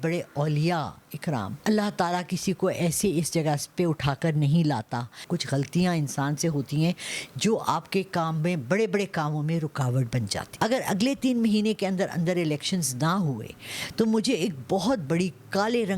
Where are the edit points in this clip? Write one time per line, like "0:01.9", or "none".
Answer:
0:01.5
0:05.2
0:10.4